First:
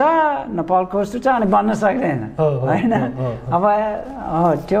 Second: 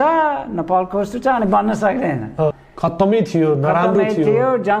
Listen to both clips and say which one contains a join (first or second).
second